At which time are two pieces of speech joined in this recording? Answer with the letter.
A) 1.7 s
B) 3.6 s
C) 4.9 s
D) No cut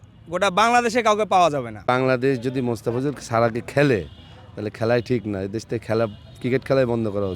A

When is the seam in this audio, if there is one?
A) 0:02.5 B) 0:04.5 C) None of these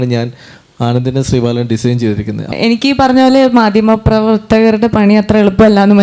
A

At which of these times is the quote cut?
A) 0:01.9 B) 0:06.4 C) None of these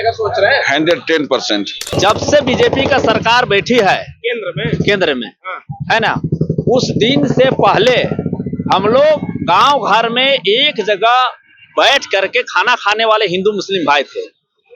A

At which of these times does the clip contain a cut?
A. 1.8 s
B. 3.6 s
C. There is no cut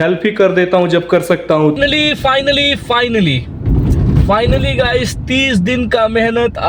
A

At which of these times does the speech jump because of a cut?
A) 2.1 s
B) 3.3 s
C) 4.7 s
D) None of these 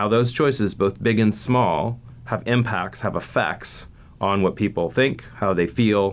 A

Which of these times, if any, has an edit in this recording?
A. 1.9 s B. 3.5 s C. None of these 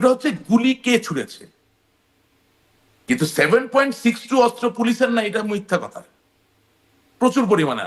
C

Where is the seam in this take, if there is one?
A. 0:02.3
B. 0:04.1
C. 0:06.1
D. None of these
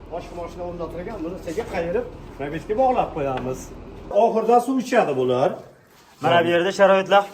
B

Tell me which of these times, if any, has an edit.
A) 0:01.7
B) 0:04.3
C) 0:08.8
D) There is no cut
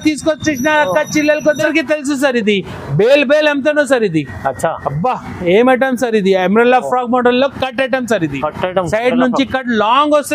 A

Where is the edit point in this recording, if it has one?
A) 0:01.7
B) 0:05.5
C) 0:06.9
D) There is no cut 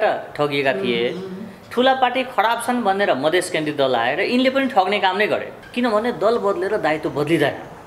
B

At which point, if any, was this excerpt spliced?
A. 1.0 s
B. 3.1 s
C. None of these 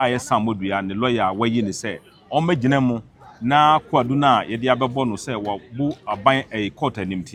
C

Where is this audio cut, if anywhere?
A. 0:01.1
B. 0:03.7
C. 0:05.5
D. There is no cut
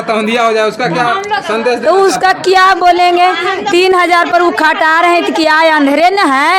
C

